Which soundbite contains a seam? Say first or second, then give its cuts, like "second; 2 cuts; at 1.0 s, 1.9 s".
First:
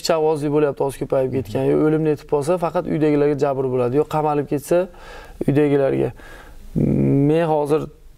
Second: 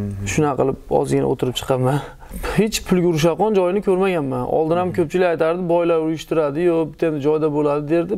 second; 1 cut; at 2.3 s